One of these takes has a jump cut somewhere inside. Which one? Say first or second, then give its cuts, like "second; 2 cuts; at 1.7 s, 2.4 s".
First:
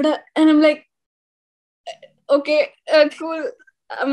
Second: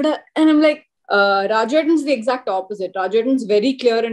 second; 1 cut; at 0.9 s